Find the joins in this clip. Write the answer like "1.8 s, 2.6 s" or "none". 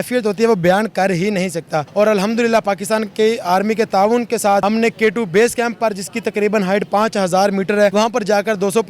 1.8 s, 4.6 s, 7.9 s